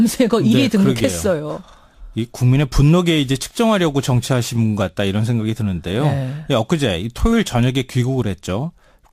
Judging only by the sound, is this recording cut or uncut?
uncut